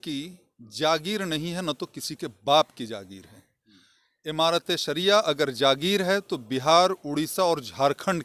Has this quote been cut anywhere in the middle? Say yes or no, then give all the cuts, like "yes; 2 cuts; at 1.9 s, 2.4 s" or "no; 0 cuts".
no; 0 cuts